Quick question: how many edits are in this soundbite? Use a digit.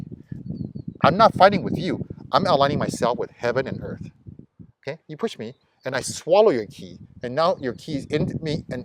0